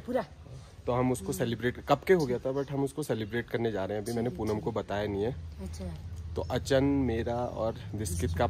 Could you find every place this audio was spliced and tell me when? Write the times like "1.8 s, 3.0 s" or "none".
none